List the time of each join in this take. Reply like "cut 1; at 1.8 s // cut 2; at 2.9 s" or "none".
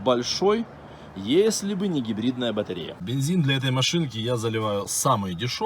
cut 1; at 2.9 s